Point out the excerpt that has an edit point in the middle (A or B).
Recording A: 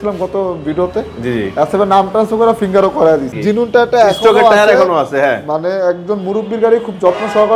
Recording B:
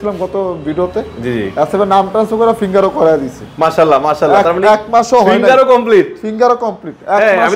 A